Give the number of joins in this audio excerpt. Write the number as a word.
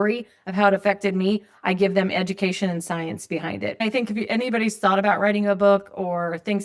one